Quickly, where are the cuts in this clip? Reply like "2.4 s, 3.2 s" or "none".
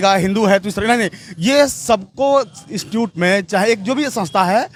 none